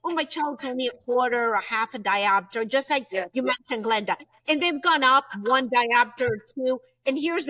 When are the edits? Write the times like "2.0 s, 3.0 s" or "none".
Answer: none